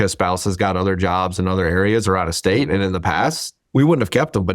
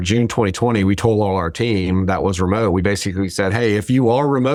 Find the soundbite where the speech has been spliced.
first; 1 cut; at 3.5 s

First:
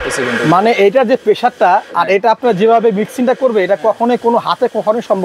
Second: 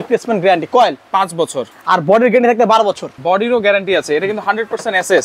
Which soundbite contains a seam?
second; 1 cut; at 3.1 s

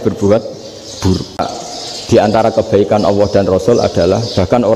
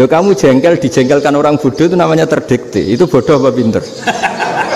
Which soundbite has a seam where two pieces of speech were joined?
first; 1 cut; at 1.4 s

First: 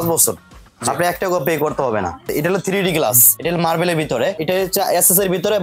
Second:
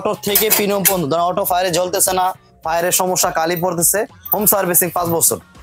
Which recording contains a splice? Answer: first; 3 cuts; at 2.3 s, 3.3 s, 4.4 s

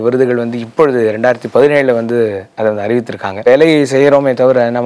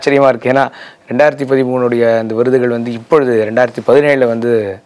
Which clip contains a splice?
first; 1 cut; at 3.5 s

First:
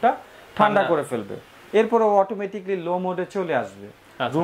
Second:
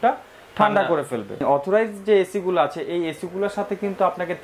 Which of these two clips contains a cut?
second; 1 cut; at 1.4 s

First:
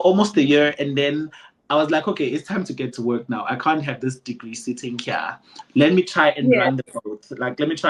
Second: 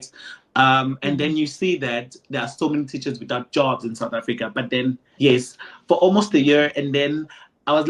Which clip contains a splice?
second; 1 cut; at 5.1 s

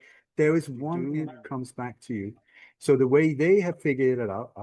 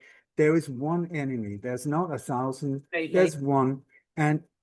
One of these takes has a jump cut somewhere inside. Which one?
first; 1 cut; at 1.0 s

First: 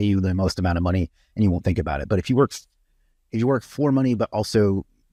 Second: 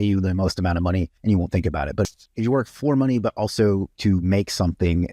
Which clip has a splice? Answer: second; 3 cuts; at 1.1 s, 2.1 s, 3.9 s

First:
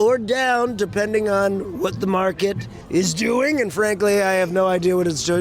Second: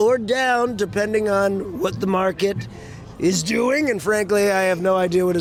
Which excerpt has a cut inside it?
first; 1 cut; at 2.7 s

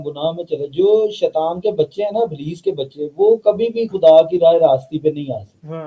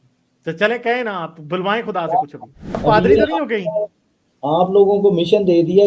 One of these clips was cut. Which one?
second; 1 cut; at 2.8 s

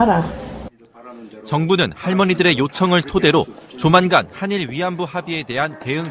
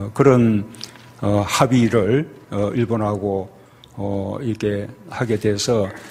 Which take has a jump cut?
second; 1 cut; at 4.9 s

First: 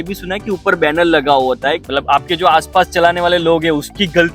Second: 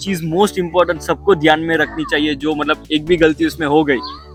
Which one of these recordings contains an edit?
first; 1 cut; at 1.8 s

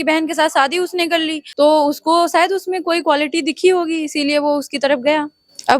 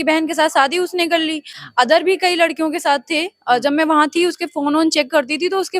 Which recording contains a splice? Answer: first; 1 cut; at 1.4 s

